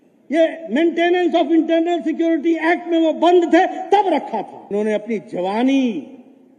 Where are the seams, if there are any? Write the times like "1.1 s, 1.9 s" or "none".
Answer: 4.7 s